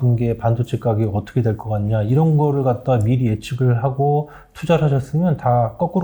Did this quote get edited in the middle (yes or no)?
no